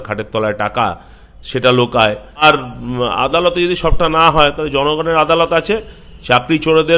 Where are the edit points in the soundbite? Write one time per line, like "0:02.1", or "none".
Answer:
0:02.4